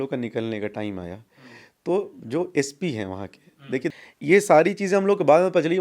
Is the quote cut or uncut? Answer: cut